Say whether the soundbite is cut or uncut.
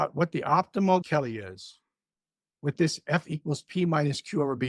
cut